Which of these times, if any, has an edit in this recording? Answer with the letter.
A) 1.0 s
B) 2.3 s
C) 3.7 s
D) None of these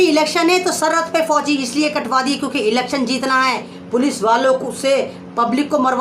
C